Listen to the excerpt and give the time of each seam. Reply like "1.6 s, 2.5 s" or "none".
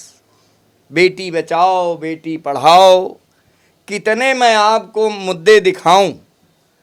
none